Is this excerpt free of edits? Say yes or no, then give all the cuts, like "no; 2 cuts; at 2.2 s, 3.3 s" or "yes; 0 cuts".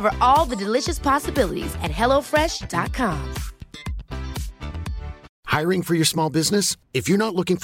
no; 1 cut; at 5.3 s